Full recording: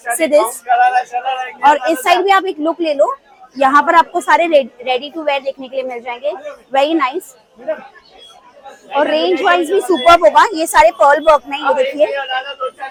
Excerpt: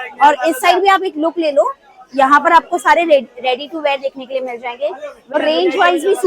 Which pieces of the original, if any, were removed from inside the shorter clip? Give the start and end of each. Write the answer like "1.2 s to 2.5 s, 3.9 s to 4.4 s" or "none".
6.8 s to 9.0 s